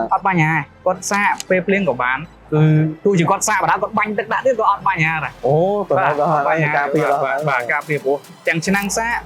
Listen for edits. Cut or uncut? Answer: uncut